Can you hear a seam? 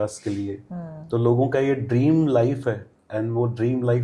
no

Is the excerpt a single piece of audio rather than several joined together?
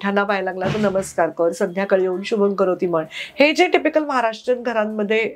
yes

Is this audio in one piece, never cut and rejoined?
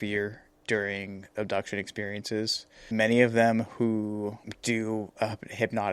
no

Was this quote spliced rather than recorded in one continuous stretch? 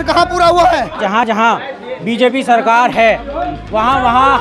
yes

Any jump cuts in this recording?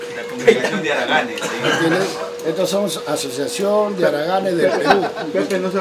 no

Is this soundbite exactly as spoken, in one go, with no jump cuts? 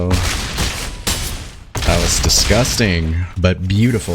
no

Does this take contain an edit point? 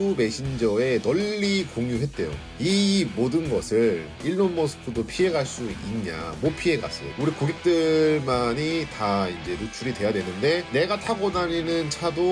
yes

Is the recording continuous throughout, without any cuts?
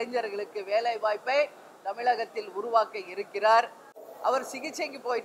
no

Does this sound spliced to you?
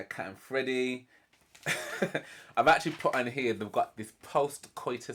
no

